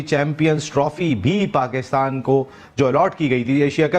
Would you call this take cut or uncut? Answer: uncut